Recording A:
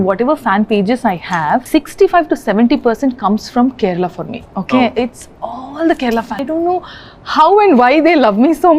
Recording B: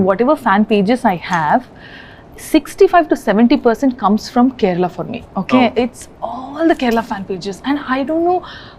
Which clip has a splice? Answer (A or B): A